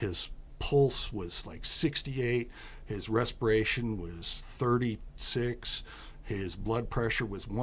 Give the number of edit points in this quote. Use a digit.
0